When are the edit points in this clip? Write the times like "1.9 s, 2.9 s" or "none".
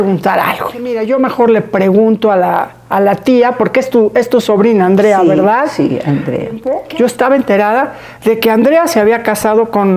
1.0 s, 6.7 s